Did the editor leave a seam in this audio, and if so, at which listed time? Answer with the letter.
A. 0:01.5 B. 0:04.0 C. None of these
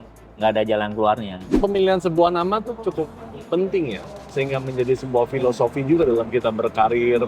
A